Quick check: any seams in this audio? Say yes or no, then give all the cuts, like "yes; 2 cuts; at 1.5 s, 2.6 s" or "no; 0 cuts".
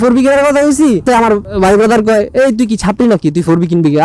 yes; 1 cut; at 1.0 s